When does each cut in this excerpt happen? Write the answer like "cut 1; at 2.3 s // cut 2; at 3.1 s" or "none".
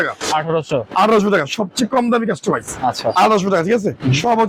none